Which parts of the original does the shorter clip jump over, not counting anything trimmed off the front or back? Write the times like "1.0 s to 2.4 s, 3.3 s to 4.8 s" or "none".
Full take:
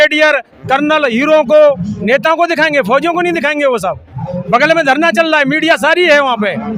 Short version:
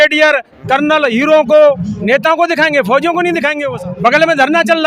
3.7 s to 4.1 s